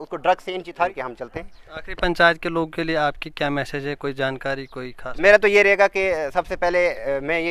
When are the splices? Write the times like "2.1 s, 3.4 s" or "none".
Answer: 0.9 s